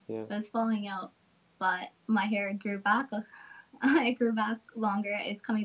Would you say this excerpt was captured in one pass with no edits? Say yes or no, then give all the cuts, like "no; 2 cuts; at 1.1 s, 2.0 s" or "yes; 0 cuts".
yes; 0 cuts